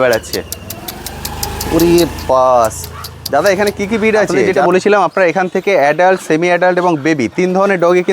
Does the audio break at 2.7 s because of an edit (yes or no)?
no